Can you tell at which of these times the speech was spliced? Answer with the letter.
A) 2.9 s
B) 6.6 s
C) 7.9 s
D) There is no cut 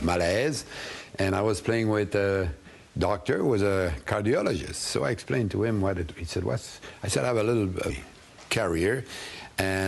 D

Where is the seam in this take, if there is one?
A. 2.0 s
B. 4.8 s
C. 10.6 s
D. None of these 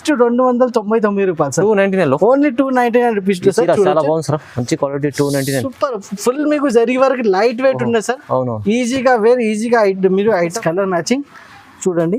C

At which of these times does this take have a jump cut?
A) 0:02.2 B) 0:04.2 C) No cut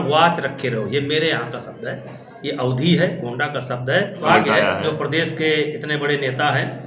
B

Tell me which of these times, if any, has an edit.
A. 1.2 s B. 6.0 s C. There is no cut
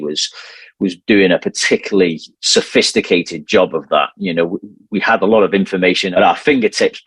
B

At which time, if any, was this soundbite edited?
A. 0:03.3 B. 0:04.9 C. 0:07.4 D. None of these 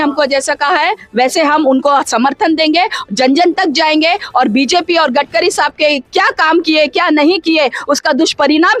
D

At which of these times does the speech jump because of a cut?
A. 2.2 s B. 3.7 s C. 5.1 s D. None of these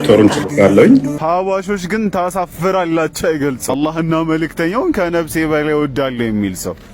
B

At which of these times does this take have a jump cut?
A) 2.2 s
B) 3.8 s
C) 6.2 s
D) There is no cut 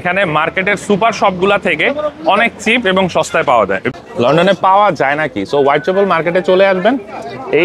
B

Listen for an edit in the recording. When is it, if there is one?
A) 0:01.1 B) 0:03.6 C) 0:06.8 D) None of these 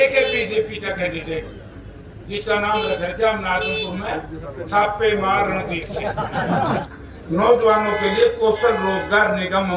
C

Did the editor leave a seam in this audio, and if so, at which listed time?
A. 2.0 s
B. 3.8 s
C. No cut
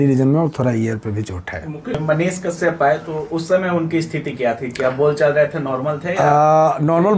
A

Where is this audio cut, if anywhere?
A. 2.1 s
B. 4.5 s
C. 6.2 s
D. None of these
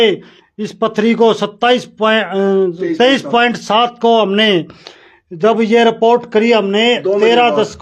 D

